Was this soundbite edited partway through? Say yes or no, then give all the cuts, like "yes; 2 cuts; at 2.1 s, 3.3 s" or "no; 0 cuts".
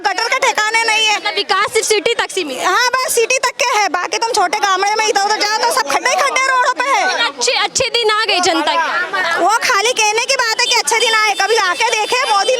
no; 0 cuts